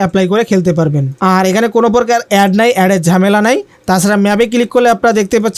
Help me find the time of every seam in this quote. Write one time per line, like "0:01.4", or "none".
0:01.1